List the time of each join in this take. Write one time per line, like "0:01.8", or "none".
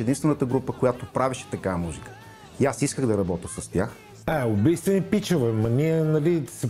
0:04.1